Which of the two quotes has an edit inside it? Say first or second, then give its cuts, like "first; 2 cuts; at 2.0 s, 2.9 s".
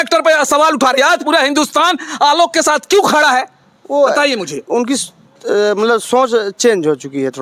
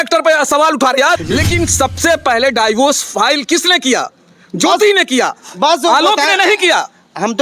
second; 1 cut; at 1.2 s